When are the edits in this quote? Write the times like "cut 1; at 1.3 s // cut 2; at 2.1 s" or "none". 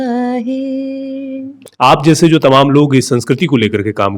cut 1; at 1.7 s